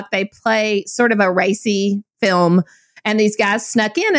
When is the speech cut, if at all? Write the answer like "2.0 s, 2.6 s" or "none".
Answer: 2.1 s